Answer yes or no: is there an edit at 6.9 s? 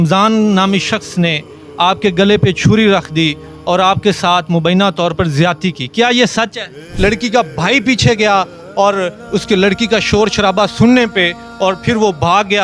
yes